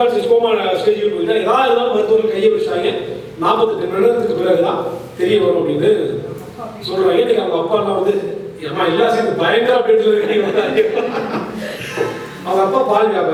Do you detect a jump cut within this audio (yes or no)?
no